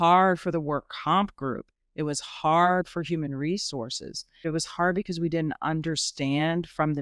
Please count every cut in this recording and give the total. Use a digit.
1